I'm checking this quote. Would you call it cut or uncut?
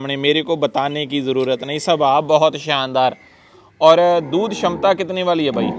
uncut